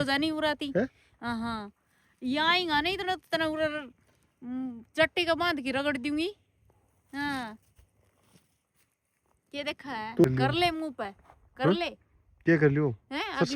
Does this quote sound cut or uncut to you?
cut